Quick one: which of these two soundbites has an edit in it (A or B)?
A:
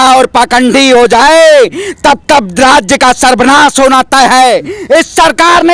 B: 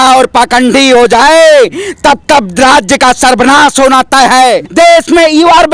B